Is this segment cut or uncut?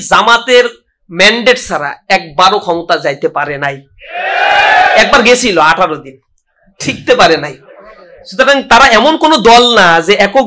uncut